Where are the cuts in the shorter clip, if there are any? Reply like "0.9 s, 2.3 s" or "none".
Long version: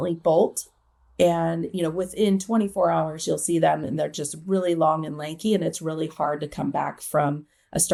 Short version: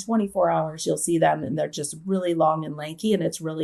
none